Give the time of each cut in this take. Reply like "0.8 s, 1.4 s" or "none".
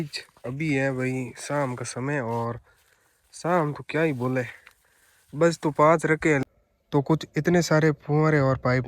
6.4 s